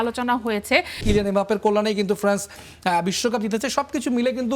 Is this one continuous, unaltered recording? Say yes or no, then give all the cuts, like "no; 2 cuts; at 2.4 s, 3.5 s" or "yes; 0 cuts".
no; 1 cut; at 1.0 s